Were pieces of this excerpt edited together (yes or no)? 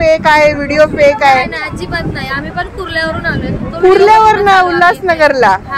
no